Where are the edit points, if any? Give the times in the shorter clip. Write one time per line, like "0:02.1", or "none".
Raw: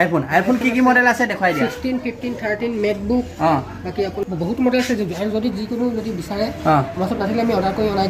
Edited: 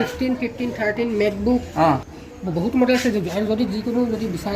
0:02.3